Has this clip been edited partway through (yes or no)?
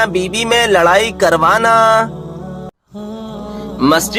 no